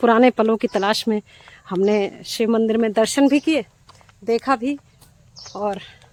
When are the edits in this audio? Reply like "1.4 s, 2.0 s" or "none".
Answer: none